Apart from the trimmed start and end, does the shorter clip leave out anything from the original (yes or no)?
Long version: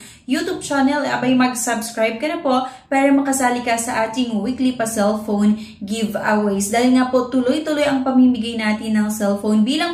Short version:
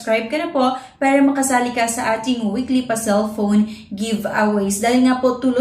no